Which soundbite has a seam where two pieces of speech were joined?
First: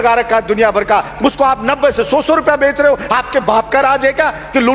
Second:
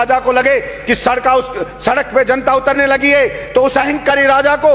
first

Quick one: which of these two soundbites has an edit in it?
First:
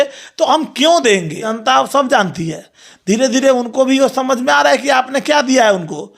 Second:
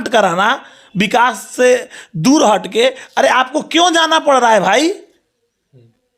first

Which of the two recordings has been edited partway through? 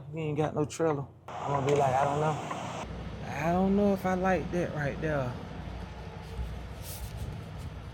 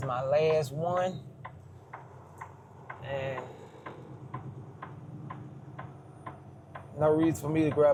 first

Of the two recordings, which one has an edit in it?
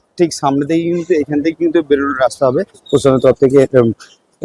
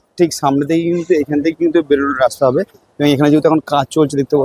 first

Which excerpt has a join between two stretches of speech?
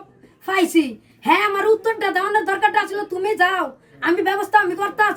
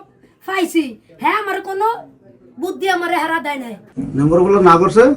second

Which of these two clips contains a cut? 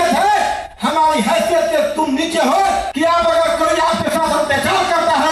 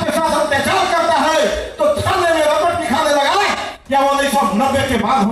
first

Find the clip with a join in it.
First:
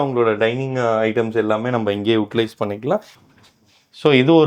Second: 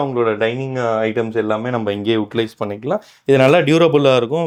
first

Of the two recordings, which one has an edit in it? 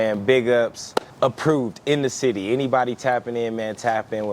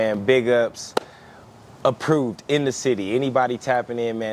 first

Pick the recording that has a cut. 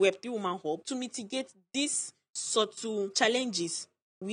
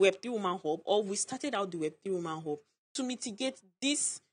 first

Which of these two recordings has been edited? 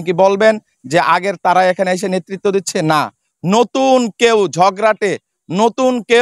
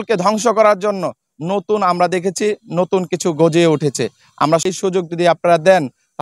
second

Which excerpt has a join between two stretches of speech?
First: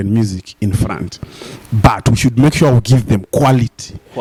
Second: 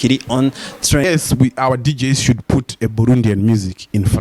second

